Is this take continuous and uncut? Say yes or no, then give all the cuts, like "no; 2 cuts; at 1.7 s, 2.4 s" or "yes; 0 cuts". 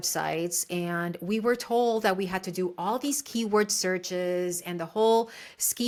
yes; 0 cuts